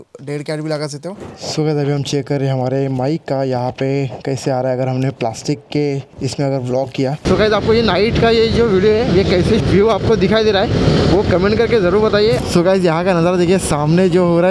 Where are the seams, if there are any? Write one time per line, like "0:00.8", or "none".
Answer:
0:01.3
0:06.1
0:07.2
0:12.4